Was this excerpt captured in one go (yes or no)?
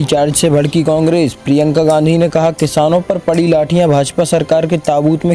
yes